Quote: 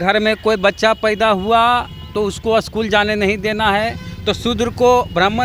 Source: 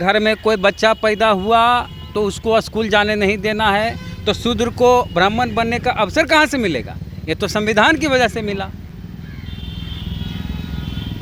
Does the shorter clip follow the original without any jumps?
yes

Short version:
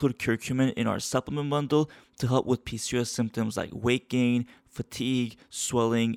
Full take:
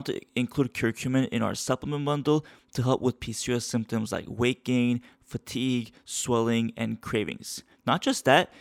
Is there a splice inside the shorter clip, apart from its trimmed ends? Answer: no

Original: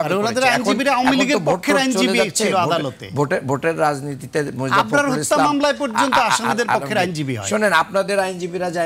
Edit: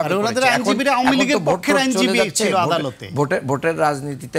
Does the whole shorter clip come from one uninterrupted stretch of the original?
yes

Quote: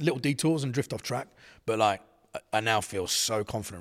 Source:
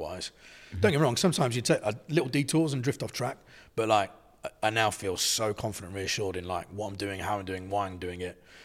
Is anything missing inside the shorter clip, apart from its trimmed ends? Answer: no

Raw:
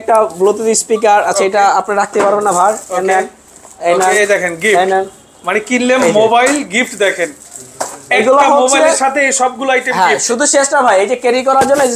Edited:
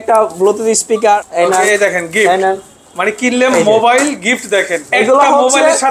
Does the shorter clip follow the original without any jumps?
no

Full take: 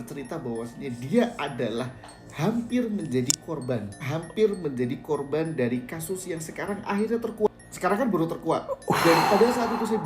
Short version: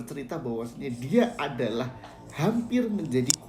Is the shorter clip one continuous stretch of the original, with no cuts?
yes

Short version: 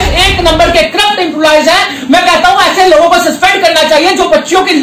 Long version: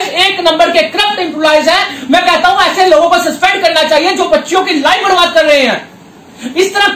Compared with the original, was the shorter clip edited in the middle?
no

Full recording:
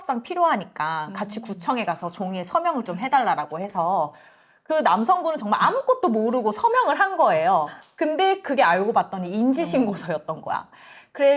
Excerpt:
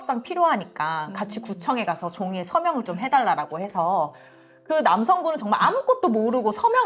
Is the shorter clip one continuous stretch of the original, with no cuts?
yes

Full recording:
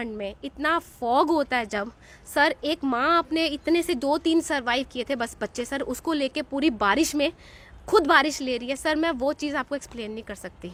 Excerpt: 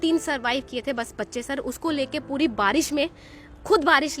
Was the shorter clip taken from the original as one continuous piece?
yes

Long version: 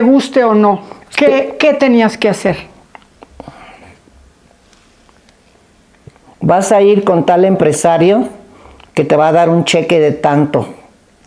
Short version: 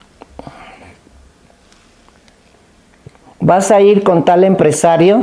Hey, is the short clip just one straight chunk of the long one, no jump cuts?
yes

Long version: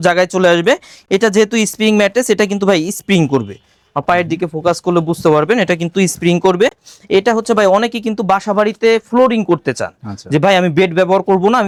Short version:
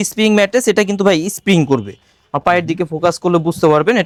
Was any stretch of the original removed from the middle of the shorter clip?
no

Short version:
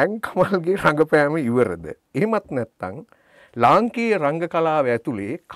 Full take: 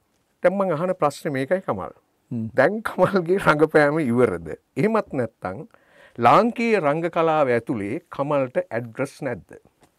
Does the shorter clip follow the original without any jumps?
yes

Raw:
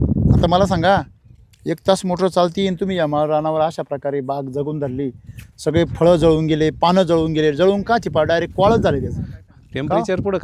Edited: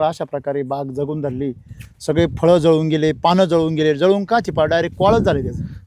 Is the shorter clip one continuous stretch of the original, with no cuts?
yes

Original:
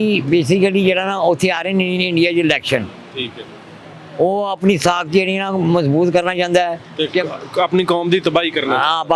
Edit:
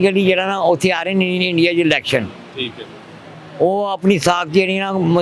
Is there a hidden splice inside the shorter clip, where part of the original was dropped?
no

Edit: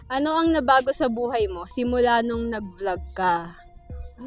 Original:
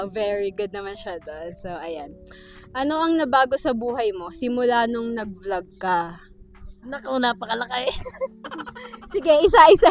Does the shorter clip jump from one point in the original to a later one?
no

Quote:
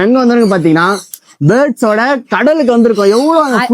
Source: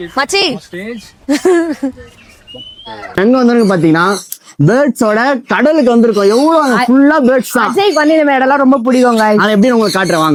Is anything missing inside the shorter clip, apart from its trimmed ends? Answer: no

